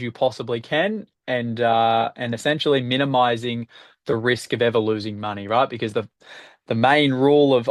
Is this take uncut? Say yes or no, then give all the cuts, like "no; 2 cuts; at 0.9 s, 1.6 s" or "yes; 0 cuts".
yes; 0 cuts